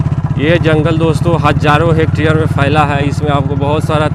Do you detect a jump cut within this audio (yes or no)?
no